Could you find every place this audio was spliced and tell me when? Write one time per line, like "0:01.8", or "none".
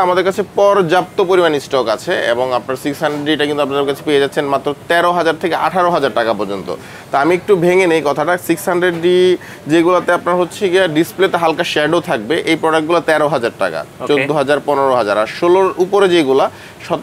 none